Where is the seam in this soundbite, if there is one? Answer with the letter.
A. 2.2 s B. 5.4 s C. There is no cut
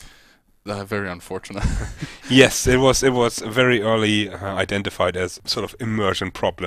B